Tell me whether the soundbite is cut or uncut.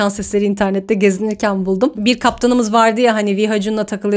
uncut